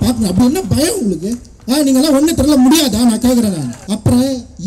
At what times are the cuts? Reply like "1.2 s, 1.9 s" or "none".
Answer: 3.8 s